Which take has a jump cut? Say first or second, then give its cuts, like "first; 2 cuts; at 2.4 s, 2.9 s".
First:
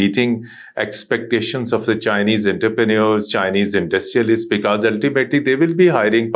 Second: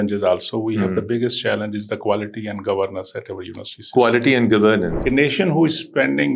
second; 1 cut; at 5.0 s